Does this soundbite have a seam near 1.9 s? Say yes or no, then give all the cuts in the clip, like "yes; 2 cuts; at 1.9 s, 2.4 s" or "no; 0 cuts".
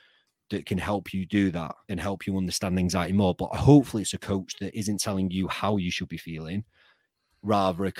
yes; 1 cut; at 1.9 s